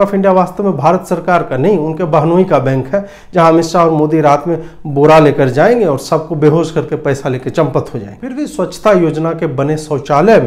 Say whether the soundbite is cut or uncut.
cut